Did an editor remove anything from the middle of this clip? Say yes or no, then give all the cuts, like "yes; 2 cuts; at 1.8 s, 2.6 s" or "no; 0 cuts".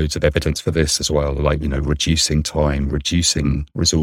no; 0 cuts